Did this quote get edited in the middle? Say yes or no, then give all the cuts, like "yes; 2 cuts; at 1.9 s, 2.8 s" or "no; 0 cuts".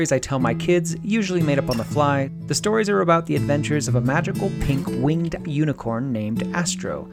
yes; 1 cut; at 2.4 s